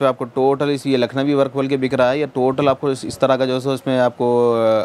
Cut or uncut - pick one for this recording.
uncut